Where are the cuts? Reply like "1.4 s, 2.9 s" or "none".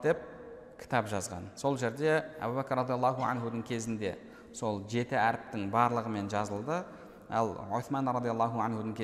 2.3 s